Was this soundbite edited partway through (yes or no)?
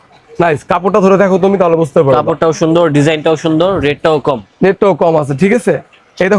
no